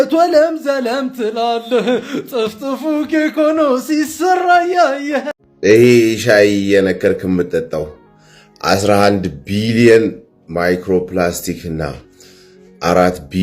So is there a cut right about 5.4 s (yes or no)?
yes